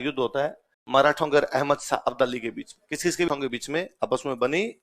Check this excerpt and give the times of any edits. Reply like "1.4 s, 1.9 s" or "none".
3.3 s